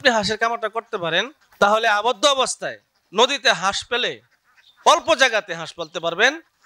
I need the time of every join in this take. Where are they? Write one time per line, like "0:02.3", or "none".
0:01.4